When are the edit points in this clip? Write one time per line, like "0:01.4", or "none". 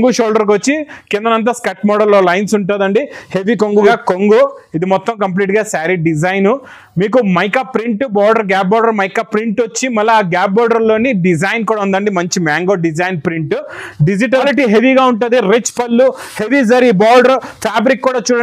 0:03.9
0:14.4